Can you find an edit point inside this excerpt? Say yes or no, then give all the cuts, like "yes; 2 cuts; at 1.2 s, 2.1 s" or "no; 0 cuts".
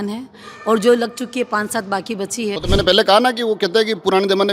yes; 1 cut; at 2.6 s